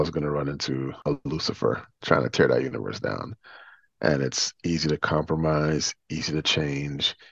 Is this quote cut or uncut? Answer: cut